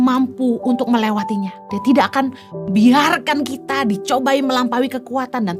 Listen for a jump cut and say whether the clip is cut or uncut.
cut